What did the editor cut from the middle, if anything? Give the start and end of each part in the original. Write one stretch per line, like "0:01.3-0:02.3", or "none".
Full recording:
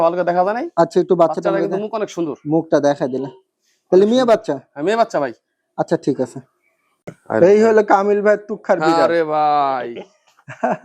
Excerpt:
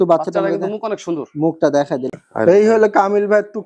0:03.3-0:07.1